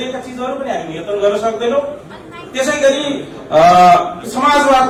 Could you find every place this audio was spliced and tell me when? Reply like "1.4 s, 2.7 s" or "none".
none